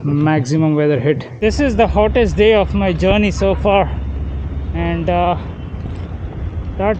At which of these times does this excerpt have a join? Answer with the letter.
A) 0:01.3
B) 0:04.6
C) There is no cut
A